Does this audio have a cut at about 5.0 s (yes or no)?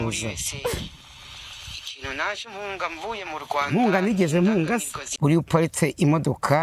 yes